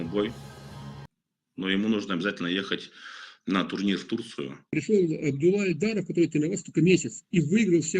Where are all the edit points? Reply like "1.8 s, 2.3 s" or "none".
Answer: 4.7 s